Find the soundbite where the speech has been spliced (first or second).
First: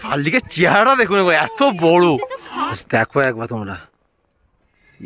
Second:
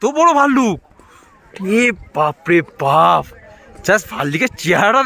first